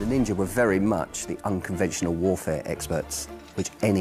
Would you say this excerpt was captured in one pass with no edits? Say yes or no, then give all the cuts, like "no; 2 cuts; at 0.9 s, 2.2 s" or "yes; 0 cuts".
yes; 0 cuts